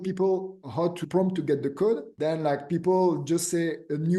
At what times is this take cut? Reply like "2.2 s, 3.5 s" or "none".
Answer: 1.0 s, 2.1 s

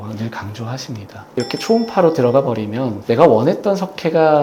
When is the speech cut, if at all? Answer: 1.3 s

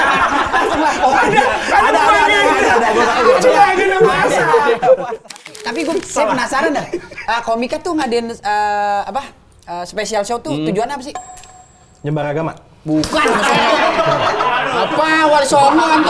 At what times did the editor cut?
5.2 s

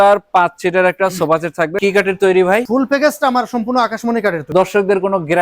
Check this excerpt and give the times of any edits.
1.8 s, 2.6 s, 4.5 s

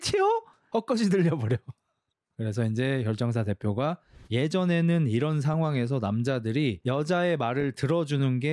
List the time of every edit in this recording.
2.2 s, 4.1 s

